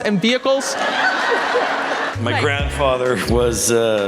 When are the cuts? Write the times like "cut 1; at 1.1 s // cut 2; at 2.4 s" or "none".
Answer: cut 1; at 2.1 s